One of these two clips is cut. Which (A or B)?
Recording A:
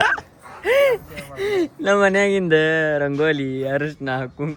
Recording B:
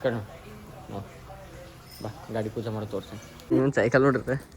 B